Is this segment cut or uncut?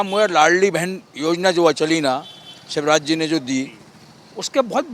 uncut